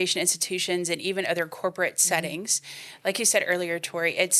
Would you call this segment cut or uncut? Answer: uncut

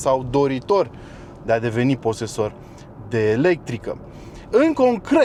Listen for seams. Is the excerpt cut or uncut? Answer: uncut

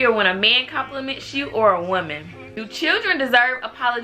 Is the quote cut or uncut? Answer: cut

